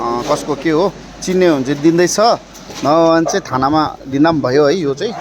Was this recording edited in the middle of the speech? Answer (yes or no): no